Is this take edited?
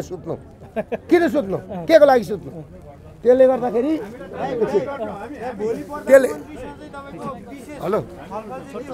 no; 0 cuts

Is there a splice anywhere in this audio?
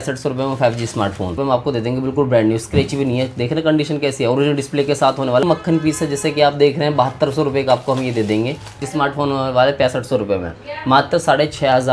yes; 3 cuts; at 1.4 s, 5.4 s, 8.9 s

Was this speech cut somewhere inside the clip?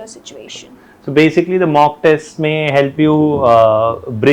no; 0 cuts

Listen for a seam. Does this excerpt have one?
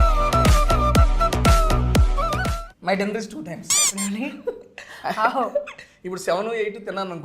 yes; 1 cut; at 2.6 s

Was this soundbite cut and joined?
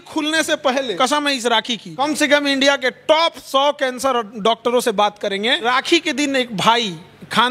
yes; 3 cuts; at 0.9 s, 1.9 s, 5.7 s

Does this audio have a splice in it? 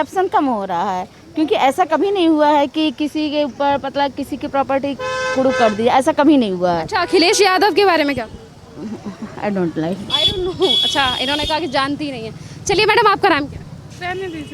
no; 0 cuts

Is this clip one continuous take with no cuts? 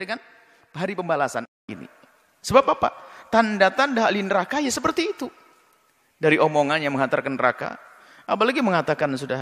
no; 1 cut; at 1.6 s

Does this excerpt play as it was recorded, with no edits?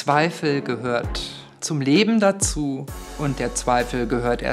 yes; 0 cuts

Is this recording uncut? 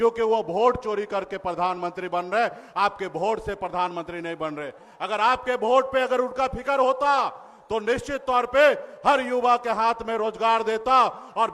yes; 0 cuts

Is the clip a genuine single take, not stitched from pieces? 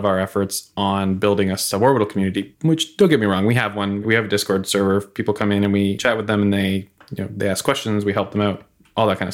yes; 0 cuts

